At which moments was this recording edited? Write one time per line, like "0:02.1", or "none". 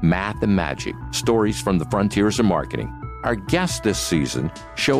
0:02.8